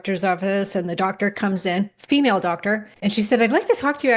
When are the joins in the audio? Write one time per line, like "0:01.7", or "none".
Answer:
0:02.9